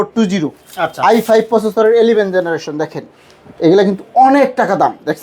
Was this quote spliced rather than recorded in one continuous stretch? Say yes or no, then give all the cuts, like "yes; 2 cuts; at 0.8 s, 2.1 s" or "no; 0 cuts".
no; 0 cuts